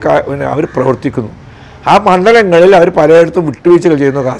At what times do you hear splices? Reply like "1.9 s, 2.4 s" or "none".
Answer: none